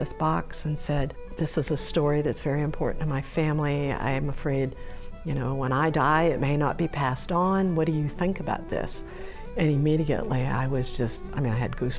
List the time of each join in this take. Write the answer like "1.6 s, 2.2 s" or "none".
1.2 s